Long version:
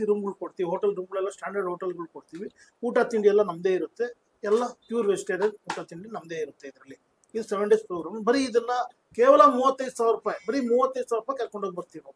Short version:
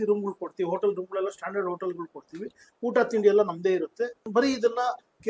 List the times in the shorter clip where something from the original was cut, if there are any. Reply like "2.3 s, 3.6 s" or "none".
4.2 s